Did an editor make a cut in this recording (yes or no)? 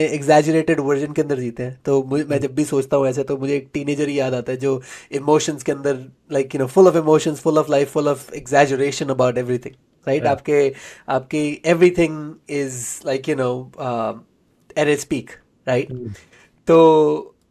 no